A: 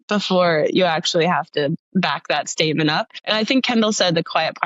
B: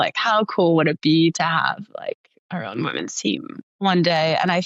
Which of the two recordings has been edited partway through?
A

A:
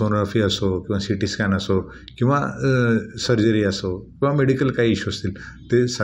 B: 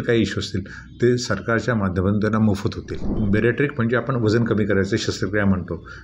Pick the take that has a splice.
B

